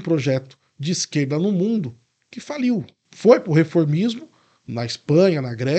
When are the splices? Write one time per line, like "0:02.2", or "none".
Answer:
0:03.0